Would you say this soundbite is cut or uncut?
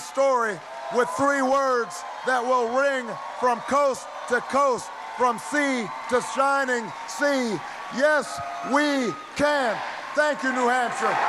uncut